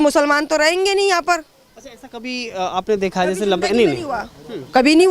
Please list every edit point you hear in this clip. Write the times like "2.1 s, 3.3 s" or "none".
none